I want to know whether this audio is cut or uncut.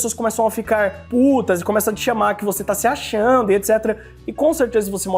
uncut